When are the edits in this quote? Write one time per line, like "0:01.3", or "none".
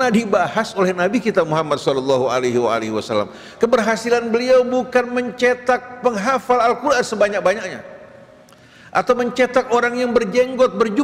0:03.4